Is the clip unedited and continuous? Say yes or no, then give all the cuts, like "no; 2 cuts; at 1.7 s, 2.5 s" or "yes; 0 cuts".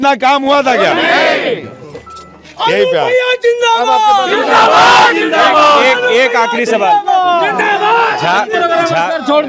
yes; 0 cuts